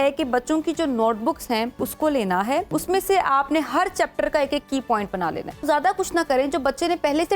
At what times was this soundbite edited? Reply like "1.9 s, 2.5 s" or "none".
1.8 s, 2.7 s, 5.6 s